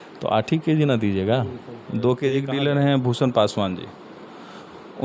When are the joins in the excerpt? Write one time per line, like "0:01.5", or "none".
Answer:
0:02.5